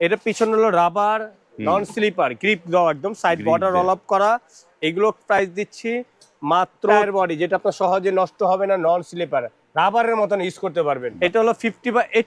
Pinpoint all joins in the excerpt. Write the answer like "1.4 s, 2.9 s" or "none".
7.0 s, 9.6 s, 11.1 s